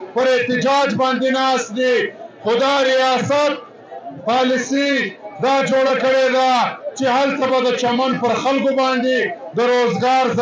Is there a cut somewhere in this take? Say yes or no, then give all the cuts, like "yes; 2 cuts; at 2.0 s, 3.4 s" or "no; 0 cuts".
no; 0 cuts